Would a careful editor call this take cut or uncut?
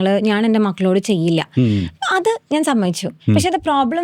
uncut